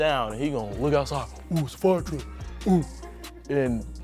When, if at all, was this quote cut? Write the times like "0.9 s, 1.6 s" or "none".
none